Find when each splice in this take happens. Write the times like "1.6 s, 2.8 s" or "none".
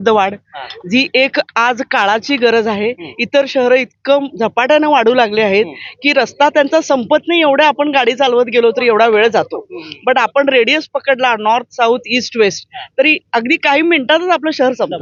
none